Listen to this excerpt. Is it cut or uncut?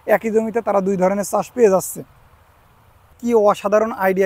cut